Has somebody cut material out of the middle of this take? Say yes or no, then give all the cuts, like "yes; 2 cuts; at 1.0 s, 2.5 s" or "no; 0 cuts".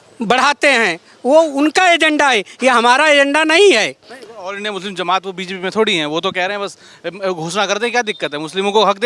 no; 0 cuts